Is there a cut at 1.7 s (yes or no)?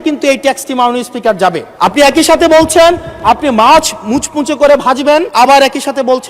yes